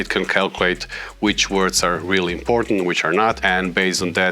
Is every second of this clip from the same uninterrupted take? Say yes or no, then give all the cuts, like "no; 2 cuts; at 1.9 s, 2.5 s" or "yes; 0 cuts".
no; 1 cut; at 3.4 s